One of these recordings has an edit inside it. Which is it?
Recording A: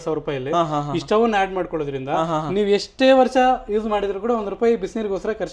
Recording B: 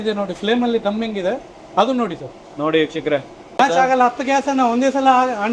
B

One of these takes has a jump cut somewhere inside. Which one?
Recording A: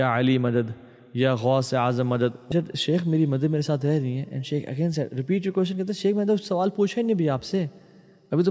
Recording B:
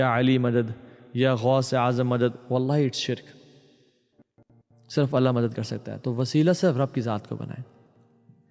A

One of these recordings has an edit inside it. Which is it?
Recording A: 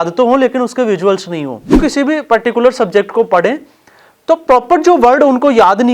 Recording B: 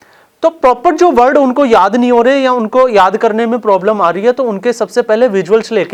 A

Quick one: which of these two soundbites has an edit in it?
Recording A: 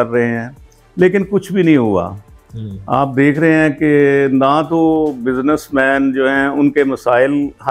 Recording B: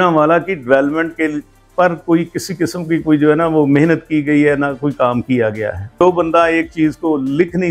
B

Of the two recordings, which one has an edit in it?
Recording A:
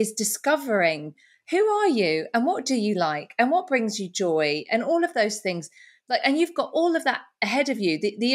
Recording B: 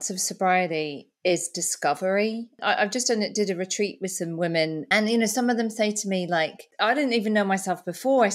B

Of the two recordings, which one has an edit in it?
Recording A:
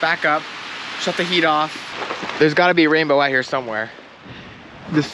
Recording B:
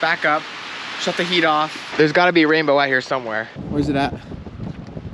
B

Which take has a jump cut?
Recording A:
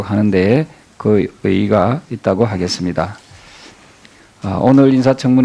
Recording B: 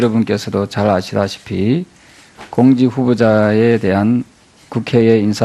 A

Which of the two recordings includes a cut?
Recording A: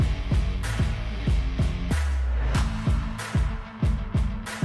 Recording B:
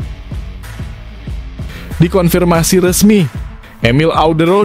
B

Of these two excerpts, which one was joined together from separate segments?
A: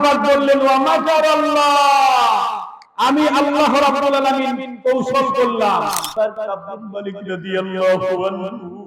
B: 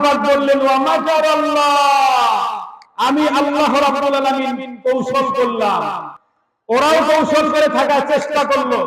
A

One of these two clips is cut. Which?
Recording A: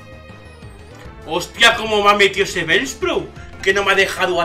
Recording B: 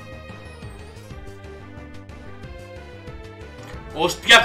A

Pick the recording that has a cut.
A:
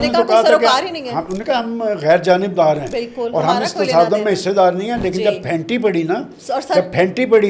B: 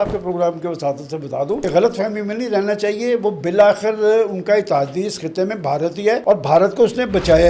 B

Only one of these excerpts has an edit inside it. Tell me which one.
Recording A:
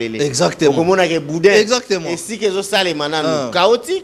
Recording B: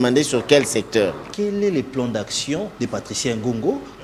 B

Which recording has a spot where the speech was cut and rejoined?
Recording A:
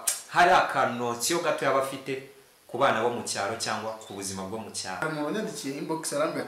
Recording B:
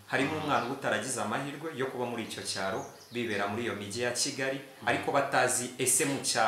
A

